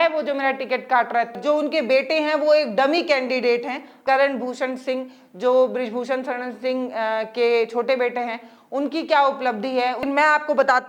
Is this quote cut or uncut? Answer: cut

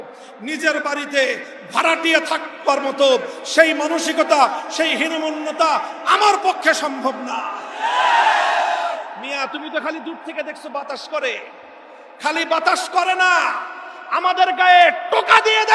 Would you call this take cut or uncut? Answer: cut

